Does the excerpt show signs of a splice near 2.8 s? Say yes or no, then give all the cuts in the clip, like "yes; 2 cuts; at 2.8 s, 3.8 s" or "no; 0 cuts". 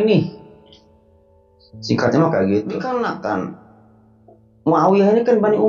yes; 1 cut; at 2.8 s